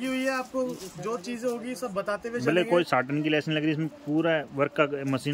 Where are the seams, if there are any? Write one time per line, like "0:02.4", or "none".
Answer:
none